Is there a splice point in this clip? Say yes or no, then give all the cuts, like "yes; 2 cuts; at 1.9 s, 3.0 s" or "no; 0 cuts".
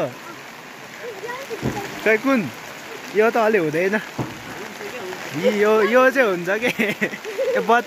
no; 0 cuts